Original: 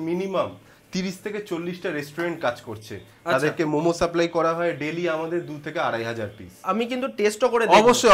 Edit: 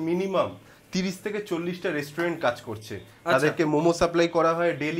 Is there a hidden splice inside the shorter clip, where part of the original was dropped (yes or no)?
no